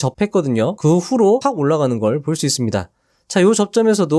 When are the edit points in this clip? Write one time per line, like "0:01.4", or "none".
0:00.8
0:01.4